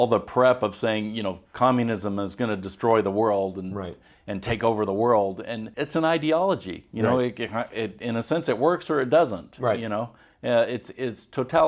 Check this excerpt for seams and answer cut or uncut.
uncut